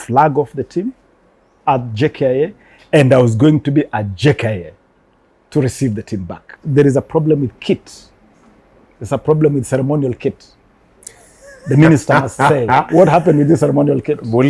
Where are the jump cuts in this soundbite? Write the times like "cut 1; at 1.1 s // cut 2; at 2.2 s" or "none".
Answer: cut 1; at 6.5 s

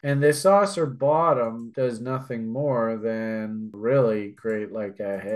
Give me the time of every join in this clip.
cut 1; at 1.6 s // cut 2; at 3.7 s

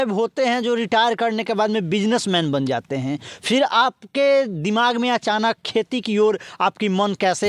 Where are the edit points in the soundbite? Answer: none

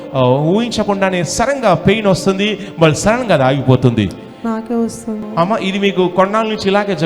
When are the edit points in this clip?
cut 1; at 5.2 s

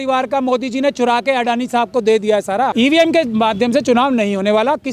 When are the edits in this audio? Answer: cut 1; at 2.7 s

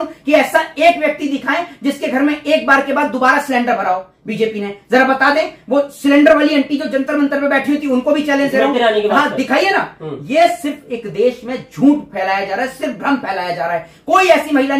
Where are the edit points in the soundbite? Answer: none

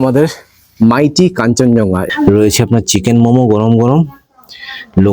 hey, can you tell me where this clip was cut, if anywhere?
cut 1; at 2.0 s

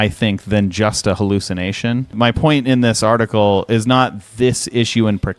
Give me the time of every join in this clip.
cut 1; at 2.1 s

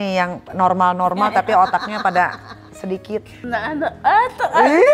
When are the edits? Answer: cut 1; at 3.4 s

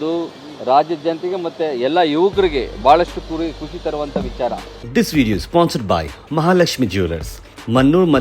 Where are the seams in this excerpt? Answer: cut 1; at 4.8 s

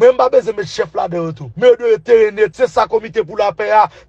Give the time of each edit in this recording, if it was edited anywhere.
cut 1; at 1.4 s // cut 2; at 2.5 s

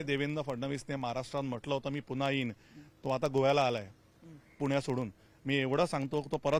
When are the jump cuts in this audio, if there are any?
none

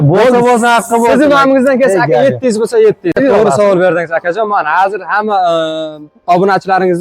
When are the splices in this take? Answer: cut 1; at 3.2 s

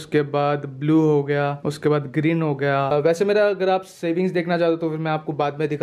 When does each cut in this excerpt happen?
cut 1; at 2.9 s

